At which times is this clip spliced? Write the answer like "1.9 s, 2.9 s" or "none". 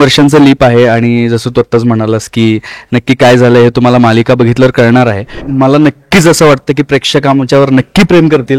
5.4 s

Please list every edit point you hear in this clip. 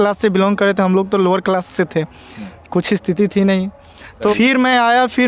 4.3 s

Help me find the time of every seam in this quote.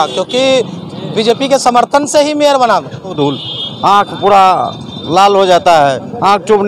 3.1 s

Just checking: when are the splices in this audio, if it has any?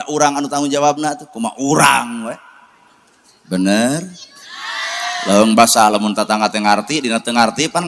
none

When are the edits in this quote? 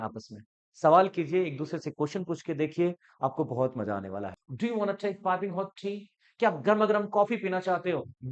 4.4 s

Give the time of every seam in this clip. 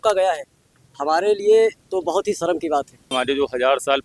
3.1 s

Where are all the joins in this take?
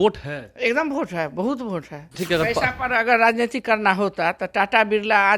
2.2 s

